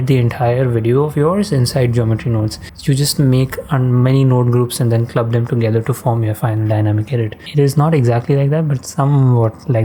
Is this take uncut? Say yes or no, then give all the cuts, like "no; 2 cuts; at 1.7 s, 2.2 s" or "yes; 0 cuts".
yes; 0 cuts